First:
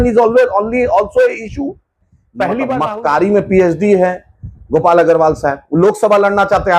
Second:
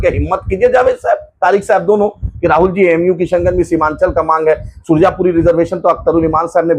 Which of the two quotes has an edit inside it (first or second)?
first